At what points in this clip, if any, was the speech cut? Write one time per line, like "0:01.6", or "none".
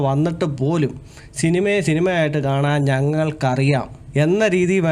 0:04.0